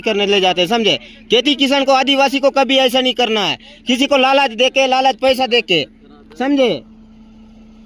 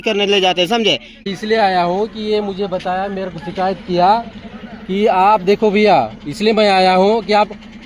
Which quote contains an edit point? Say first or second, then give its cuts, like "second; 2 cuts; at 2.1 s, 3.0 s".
second; 1 cut; at 1.3 s